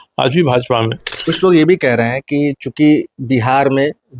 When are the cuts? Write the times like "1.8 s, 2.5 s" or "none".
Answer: 1.1 s